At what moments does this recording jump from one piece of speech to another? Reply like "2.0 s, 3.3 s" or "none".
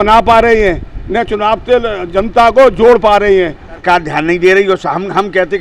3.8 s